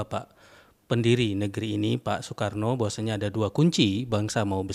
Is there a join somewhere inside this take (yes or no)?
no